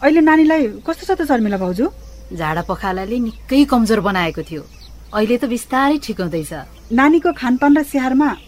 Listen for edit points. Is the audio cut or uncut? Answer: cut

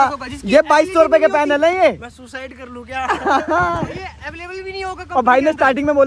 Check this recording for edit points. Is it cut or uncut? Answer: uncut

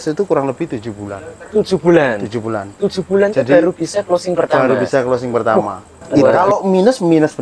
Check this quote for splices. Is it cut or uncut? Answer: cut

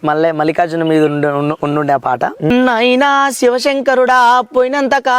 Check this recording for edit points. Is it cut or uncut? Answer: cut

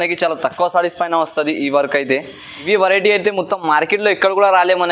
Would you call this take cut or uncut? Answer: cut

